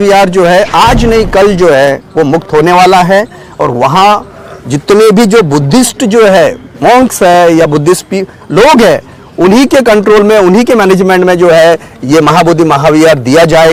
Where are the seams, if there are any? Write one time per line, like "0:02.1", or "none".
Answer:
none